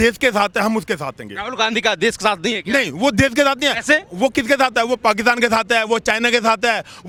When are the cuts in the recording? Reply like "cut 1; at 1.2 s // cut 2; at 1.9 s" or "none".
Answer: none